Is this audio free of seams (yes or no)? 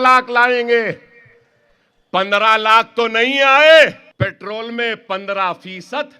no